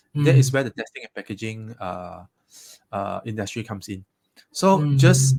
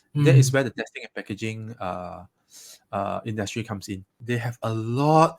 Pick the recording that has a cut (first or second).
second